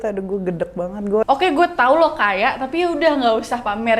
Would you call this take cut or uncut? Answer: cut